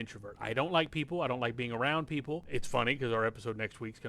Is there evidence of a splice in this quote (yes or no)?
yes